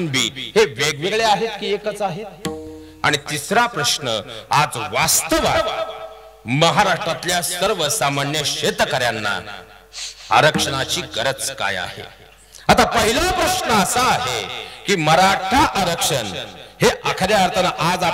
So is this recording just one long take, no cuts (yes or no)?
yes